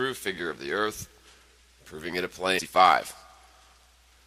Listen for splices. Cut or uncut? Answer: uncut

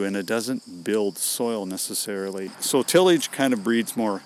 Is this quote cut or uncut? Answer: cut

